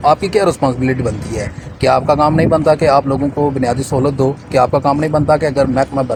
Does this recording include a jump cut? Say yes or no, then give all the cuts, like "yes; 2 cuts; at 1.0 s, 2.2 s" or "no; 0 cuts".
no; 0 cuts